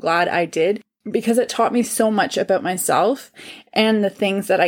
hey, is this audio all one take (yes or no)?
no